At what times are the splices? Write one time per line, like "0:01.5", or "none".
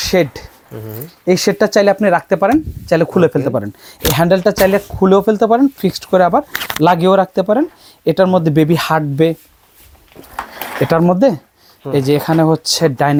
none